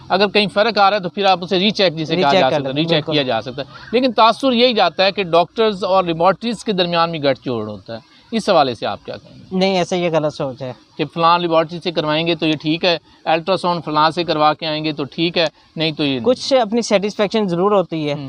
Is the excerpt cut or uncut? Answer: uncut